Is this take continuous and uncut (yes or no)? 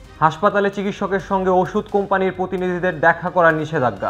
yes